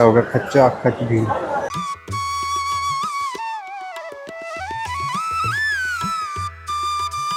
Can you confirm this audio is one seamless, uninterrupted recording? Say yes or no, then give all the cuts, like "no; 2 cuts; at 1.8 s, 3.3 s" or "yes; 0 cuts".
yes; 0 cuts